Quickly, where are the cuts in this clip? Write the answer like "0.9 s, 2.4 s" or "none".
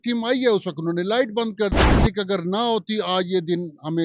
2.0 s